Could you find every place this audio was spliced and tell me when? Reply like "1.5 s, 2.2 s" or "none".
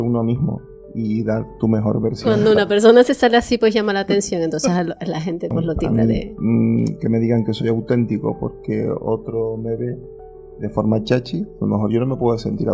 2.3 s, 5.9 s